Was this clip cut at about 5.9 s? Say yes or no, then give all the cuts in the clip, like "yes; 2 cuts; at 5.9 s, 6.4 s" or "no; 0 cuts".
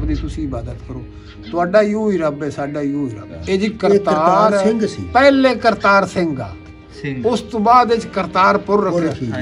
no; 1 cut; at 3.4 s